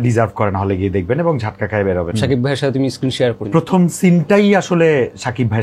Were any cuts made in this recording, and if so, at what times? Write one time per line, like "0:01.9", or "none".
0:02.1
0:03.4